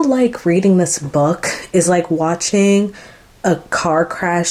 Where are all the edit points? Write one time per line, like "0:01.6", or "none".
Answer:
none